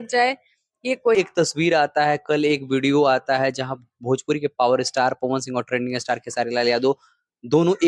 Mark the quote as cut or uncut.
cut